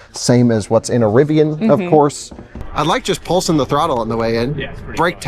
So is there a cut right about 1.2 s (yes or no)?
no